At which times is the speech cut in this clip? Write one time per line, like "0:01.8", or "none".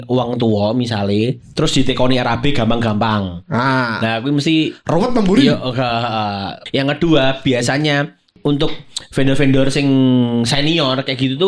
0:06.5
0:08.3